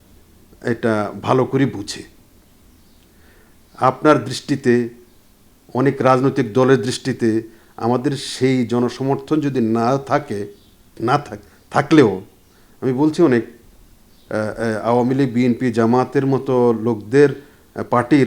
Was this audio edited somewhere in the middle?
no; 0 cuts

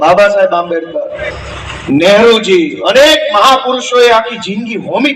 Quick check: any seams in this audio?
no; 0 cuts

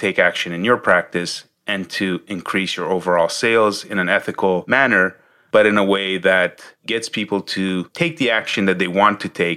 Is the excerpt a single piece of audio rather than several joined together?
yes; 0 cuts

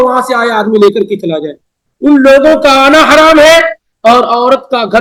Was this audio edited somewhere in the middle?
no; 0 cuts

